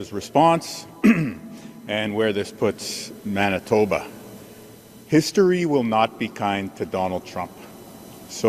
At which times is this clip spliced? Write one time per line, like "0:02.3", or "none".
none

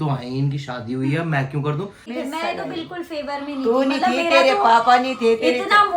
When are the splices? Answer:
0:02.1

